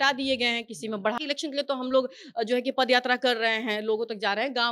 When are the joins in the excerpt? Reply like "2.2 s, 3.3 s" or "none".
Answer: 1.2 s